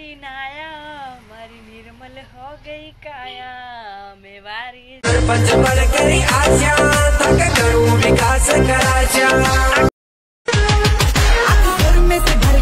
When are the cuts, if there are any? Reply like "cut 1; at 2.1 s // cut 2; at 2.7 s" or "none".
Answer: cut 1; at 10.1 s